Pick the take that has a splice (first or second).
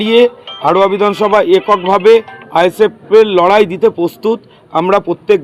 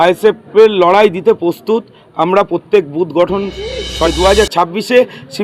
second